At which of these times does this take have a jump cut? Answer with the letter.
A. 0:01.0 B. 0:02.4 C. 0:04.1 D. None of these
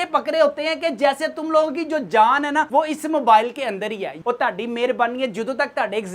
C